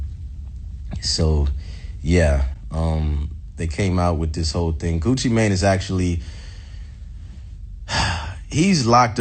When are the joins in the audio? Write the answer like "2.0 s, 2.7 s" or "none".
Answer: none